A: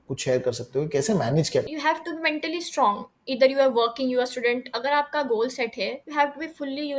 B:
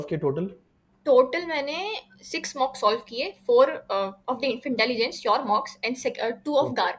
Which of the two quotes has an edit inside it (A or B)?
A